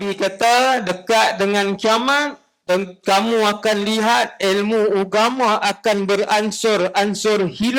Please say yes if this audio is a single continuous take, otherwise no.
yes